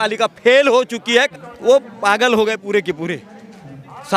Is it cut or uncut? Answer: cut